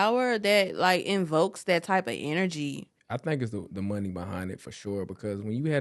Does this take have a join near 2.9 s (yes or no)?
yes